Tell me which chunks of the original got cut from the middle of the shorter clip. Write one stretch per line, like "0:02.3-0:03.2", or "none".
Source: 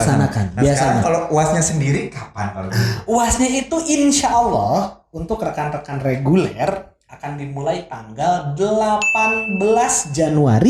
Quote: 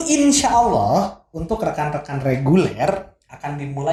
none

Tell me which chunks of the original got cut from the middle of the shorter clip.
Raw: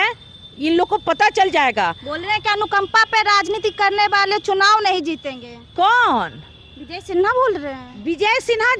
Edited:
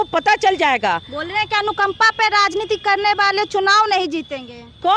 none

